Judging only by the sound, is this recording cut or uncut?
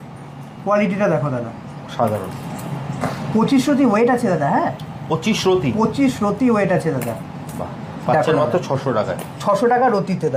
uncut